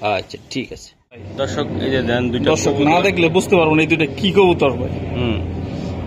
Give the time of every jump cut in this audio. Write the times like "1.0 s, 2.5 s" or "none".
none